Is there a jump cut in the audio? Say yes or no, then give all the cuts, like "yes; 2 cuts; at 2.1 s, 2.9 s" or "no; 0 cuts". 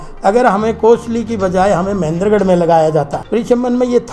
yes; 1 cut; at 3.2 s